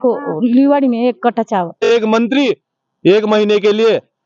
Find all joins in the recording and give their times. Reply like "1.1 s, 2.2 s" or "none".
1.8 s